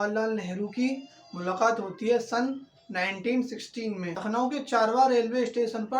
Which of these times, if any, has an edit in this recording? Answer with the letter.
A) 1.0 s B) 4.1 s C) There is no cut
B